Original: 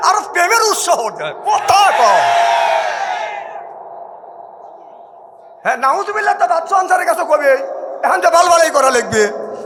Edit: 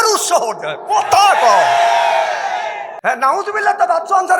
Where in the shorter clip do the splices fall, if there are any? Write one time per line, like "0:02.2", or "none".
0:02.9